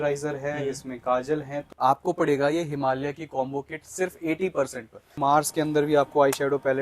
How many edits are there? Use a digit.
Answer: 2